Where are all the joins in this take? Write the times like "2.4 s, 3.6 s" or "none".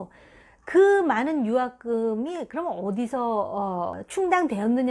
4.0 s